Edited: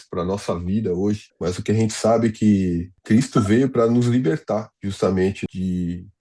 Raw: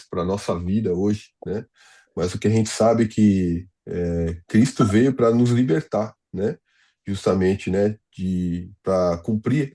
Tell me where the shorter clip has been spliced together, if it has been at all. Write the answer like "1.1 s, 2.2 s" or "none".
1.3 s, 2.9 s, 4.7 s, 5.4 s